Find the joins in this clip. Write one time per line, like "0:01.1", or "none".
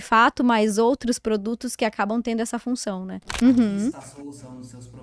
0:03.2